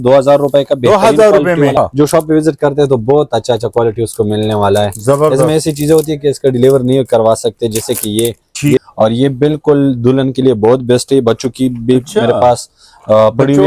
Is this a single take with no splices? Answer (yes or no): no